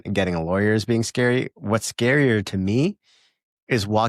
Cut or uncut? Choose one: uncut